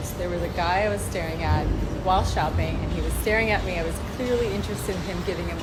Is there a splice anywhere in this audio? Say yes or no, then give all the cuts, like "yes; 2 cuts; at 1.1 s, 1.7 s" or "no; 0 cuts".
no; 0 cuts